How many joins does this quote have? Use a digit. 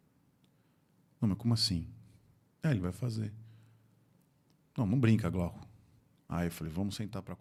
0